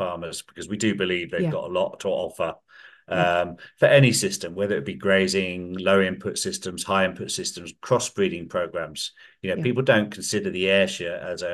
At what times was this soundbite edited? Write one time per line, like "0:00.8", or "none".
none